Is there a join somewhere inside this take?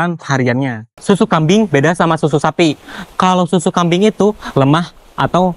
yes; 1 cut; at 0.9 s

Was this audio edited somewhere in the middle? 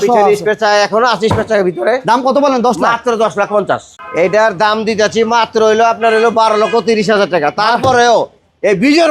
yes; 1 cut; at 3.9 s

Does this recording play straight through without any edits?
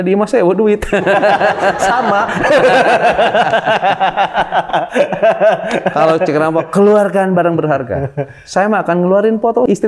yes; 0 cuts

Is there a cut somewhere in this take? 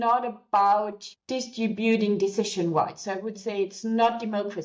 yes; 1 cut; at 1.0 s

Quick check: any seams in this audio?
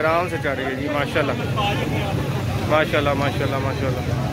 no; 0 cuts

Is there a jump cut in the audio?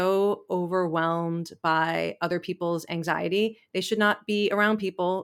no; 0 cuts

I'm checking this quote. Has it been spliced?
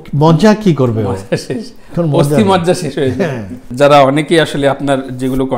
yes; 1 cut; at 3.5 s

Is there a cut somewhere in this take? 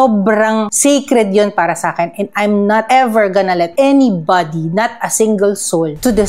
no; 0 cuts

